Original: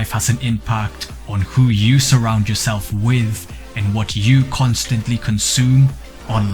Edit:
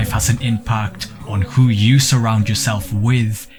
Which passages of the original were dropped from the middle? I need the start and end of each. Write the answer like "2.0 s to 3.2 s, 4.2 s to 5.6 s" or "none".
none